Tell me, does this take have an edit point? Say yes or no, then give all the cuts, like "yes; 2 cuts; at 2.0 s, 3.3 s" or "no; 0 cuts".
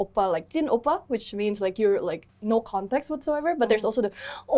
yes; 1 cut; at 2.3 s